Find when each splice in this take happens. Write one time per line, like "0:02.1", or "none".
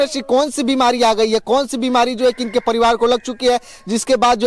none